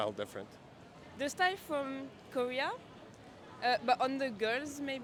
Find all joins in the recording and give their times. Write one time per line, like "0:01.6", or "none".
none